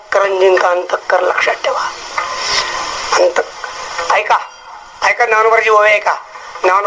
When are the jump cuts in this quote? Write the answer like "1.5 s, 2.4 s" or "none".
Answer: none